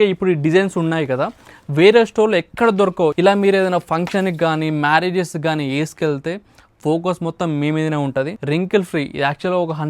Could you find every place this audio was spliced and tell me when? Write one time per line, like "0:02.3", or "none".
0:03.2
0:08.4